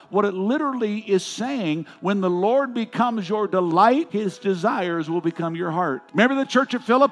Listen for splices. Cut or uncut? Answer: cut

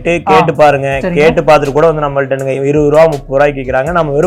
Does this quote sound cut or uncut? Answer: uncut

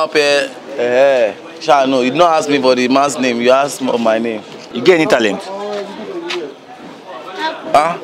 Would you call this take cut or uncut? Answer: cut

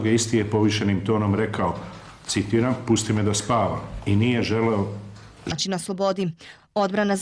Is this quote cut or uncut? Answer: uncut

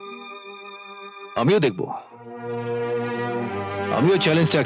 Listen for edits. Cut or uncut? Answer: uncut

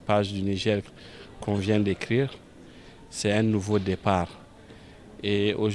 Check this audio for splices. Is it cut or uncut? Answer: uncut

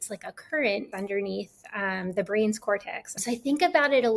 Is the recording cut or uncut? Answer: cut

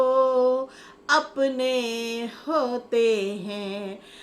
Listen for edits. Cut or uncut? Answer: uncut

